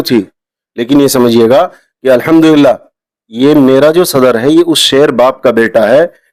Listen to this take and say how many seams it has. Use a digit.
0